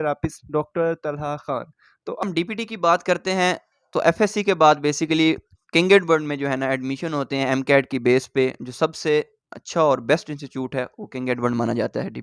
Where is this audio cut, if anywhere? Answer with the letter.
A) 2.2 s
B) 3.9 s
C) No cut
A